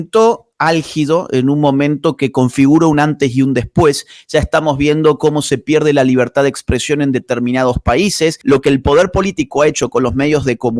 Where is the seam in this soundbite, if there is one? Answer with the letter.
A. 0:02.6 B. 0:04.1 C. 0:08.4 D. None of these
C